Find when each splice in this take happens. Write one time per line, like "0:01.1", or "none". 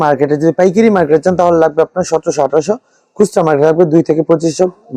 none